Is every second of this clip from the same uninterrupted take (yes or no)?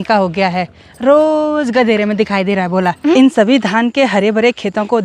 no